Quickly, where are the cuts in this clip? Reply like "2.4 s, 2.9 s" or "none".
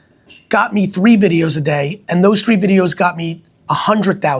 none